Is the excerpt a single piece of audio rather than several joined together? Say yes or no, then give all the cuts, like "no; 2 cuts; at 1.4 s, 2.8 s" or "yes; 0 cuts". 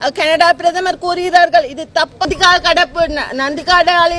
no; 1 cut; at 2.3 s